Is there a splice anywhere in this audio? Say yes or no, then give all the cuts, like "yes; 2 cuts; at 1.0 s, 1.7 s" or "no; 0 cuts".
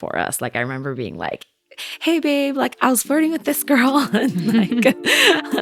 no; 0 cuts